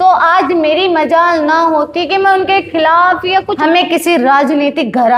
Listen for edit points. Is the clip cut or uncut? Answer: cut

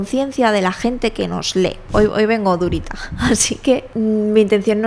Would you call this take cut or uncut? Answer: cut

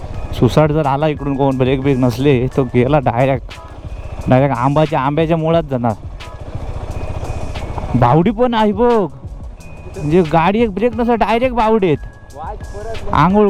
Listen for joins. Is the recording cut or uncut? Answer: uncut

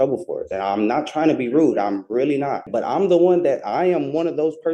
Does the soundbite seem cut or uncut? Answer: cut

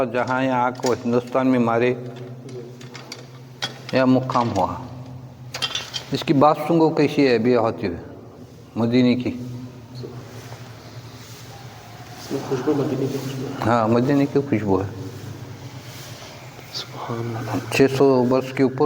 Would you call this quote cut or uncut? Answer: uncut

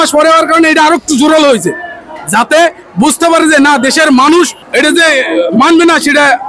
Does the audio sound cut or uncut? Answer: cut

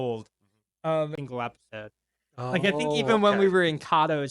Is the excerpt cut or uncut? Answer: cut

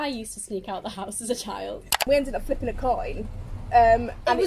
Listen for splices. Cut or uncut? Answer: cut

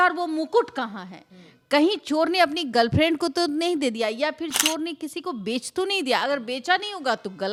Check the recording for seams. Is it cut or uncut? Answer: uncut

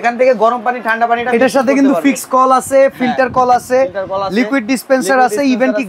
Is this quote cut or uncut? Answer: uncut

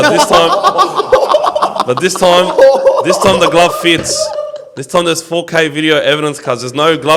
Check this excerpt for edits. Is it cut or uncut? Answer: uncut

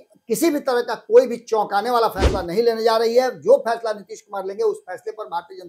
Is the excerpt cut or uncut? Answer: uncut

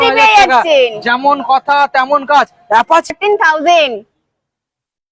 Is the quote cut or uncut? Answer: cut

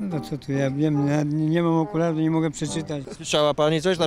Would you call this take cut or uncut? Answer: cut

